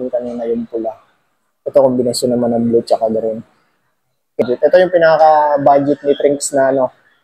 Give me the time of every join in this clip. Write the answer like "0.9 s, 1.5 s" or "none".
4.4 s